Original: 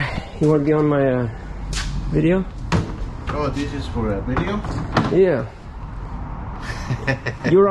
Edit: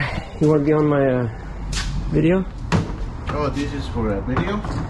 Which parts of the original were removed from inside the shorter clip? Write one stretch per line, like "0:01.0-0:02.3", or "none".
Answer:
none